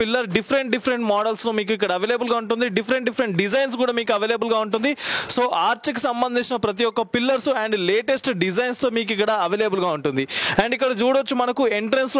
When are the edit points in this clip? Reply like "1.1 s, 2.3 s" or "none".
none